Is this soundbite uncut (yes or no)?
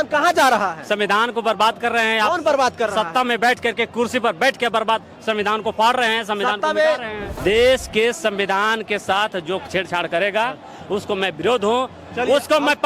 no